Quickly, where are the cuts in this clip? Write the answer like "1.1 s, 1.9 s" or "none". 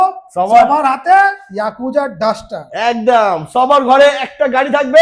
none